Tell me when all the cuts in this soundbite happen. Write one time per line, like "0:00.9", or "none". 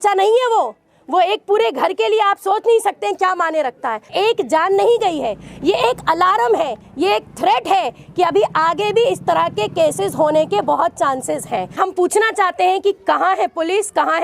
0:04.1
0:11.8